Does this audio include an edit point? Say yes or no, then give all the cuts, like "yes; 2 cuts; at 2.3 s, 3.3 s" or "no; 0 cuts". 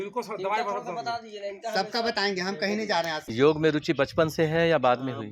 yes; 1 cut; at 3.2 s